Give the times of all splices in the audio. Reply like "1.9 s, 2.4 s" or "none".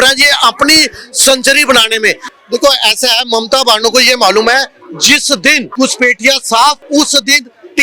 2.3 s, 5.7 s, 6.8 s